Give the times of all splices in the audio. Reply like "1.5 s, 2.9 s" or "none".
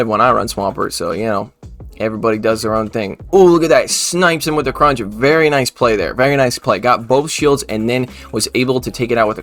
none